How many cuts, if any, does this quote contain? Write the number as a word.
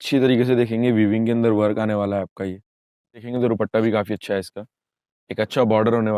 one